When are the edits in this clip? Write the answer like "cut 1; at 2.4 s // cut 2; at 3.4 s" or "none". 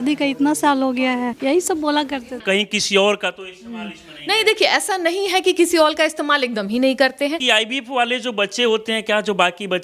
cut 1; at 1.3 s // cut 2; at 2.4 s // cut 3; at 7.4 s